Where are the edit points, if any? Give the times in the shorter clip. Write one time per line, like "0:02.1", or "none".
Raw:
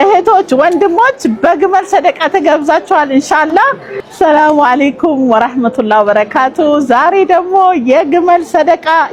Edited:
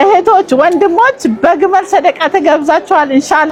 none